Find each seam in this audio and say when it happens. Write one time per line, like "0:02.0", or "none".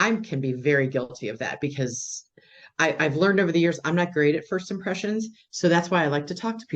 none